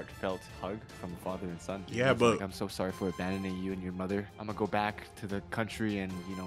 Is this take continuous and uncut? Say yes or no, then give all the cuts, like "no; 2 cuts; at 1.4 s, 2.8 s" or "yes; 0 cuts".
no; 2 cuts; at 1.8 s, 4.4 s